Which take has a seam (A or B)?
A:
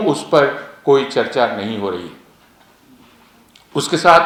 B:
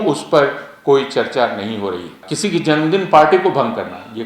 B